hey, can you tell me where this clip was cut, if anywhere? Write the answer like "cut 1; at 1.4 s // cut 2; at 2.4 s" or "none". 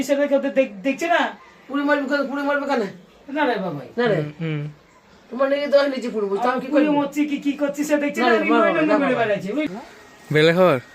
cut 1; at 9.7 s